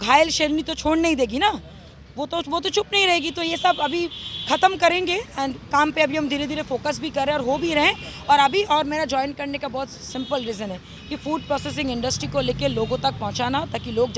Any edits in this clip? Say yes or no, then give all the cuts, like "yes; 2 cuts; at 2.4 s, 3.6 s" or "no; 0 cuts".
no; 0 cuts